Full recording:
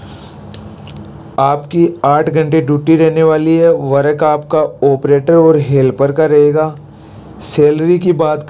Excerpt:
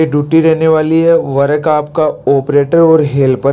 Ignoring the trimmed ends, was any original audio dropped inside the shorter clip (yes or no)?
no